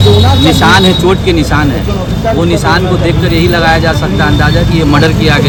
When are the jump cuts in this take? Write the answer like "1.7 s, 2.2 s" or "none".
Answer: none